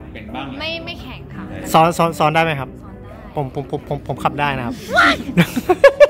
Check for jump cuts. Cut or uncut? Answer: uncut